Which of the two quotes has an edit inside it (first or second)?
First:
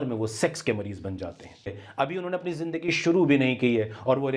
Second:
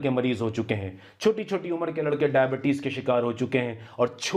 first